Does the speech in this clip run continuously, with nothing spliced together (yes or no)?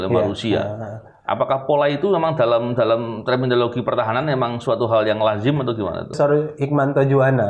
no